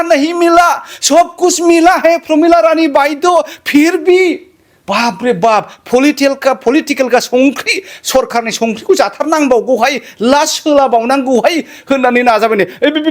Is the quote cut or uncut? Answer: uncut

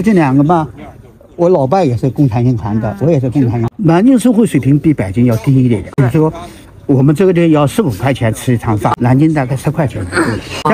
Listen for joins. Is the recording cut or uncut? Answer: uncut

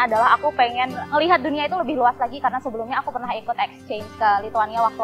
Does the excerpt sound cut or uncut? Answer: cut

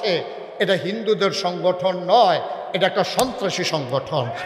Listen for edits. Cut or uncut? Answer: uncut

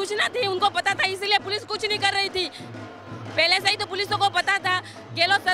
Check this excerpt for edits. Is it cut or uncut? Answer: uncut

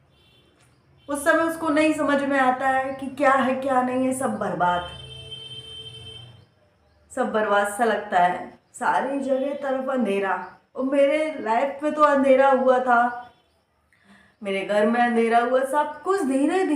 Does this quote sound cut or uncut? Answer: uncut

